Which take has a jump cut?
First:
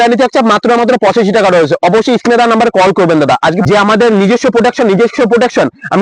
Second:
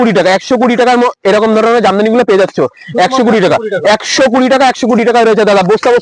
first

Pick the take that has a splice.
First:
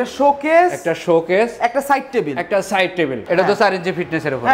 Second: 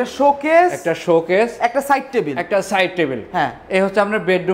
first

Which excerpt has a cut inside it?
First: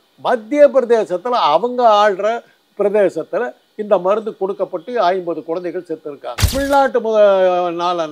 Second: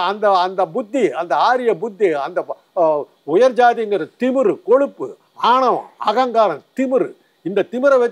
first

